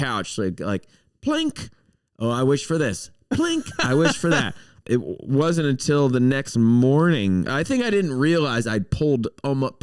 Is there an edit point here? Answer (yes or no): yes